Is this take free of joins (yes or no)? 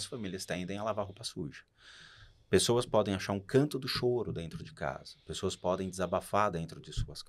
yes